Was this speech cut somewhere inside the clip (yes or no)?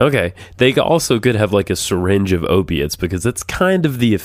no